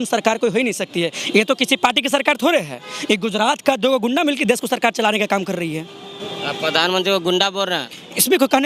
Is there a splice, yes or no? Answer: no